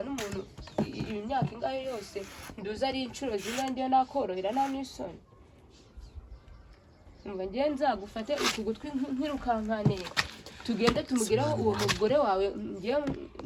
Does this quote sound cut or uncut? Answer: uncut